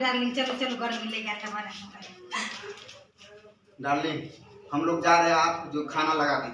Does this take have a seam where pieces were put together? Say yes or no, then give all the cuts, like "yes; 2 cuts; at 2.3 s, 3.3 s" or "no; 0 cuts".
no; 0 cuts